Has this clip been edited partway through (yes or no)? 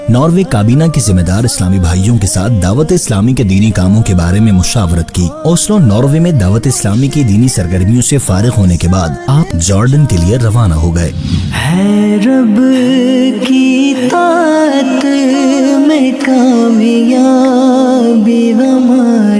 no